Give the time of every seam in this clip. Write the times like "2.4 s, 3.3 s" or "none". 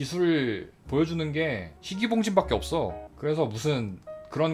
3.1 s